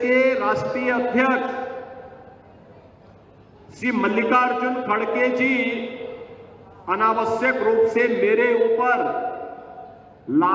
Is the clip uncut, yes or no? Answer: yes